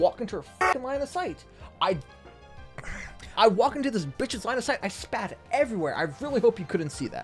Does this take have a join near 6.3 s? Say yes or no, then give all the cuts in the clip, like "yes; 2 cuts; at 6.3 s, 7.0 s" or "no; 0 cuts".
no; 1 cut; at 3.3 s